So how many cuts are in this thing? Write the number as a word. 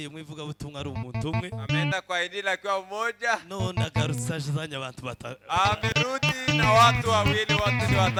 zero